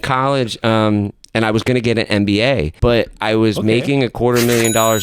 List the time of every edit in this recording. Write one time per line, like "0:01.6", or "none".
0:02.7